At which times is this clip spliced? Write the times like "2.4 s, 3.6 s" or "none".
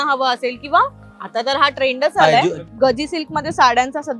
2.6 s